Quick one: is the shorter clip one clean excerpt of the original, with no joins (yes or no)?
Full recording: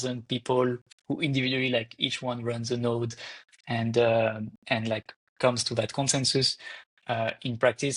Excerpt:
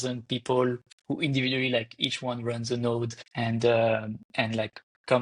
no